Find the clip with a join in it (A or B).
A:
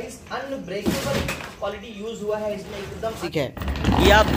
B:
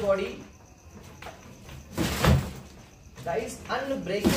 A